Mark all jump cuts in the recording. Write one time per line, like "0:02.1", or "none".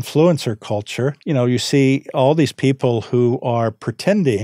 0:01.2